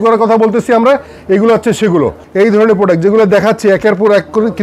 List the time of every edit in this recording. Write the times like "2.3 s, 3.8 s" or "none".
2.2 s

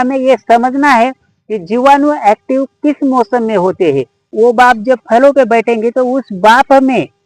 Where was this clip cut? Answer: 4.3 s

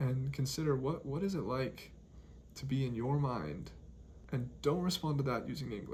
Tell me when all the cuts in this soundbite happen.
none

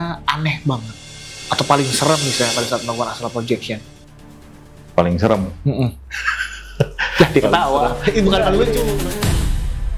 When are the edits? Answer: 8.9 s

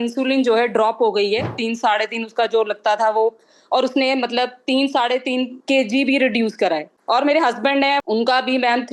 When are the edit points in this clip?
6.9 s, 8.0 s

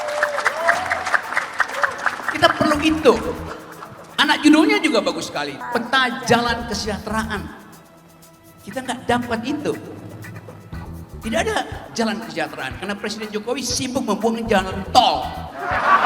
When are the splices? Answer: 5.6 s

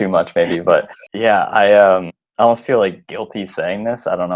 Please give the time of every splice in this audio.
1.0 s, 2.2 s

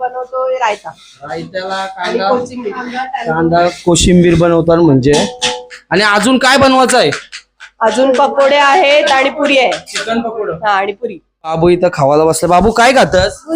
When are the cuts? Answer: 11.5 s

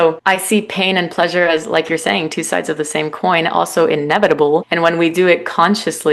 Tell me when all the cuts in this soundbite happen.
4.7 s

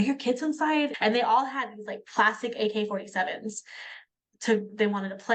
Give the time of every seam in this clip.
0.9 s

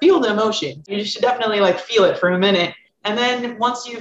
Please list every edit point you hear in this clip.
0.9 s, 2.9 s

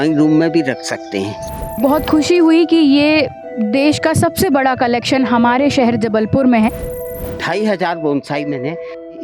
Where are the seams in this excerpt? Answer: 1.8 s, 7.1 s

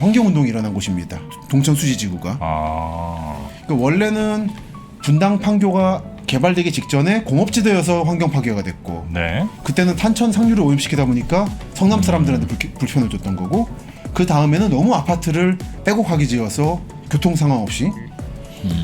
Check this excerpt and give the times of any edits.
1.4 s

